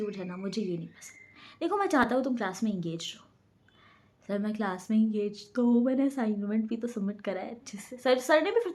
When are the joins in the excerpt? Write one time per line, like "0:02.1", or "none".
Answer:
none